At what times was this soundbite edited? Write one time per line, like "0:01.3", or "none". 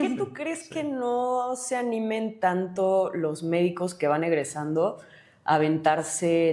none